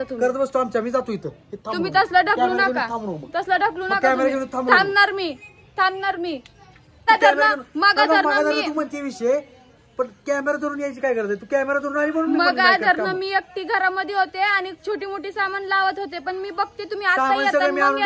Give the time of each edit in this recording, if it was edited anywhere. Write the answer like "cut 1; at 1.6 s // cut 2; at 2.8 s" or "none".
cut 1; at 7.0 s